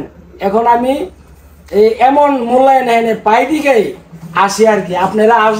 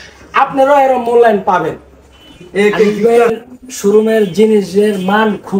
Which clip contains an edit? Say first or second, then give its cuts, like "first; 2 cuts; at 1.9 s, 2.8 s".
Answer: second; 1 cut; at 2.9 s